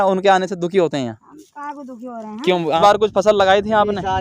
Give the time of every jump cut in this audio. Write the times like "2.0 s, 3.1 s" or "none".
2.8 s